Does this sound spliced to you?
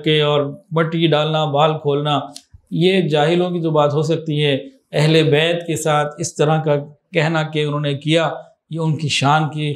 no; 0 cuts

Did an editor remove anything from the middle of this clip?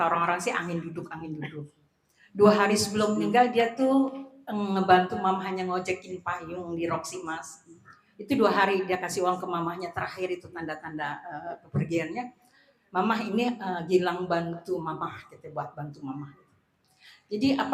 no; 0 cuts

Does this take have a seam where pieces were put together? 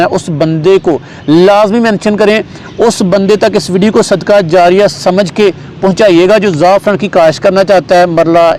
no; 0 cuts

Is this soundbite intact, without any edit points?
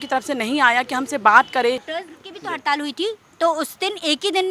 no; 1 cut; at 1.9 s

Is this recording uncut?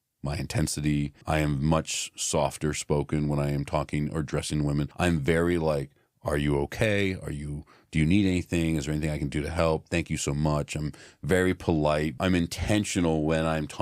no; 3 cuts; at 1.2 s, 4.9 s, 12.2 s

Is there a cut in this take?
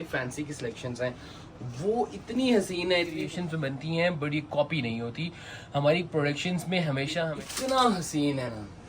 yes; 2 cuts; at 3.2 s, 7.4 s

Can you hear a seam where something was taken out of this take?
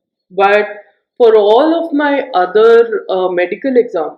no; 0 cuts

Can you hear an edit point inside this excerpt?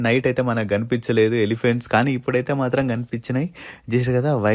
no; 0 cuts

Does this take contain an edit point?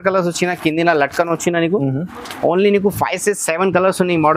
no; 0 cuts

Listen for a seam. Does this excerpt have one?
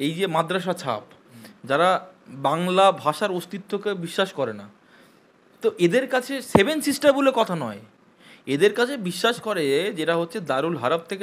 no; 0 cuts

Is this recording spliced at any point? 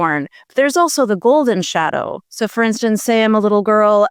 no; 0 cuts

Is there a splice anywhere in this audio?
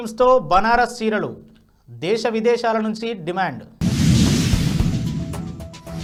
no; 0 cuts

